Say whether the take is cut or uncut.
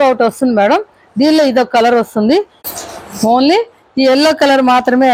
cut